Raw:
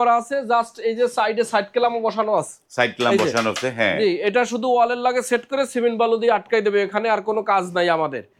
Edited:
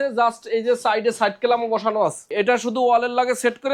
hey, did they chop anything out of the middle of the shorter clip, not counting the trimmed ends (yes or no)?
yes